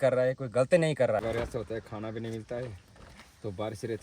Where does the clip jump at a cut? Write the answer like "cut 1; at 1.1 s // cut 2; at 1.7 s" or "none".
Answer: cut 1; at 1.2 s